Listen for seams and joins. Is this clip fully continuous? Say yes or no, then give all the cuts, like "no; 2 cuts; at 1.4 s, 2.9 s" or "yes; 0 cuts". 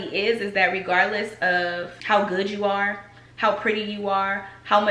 yes; 0 cuts